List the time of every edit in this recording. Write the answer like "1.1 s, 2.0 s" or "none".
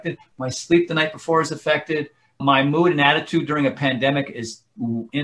none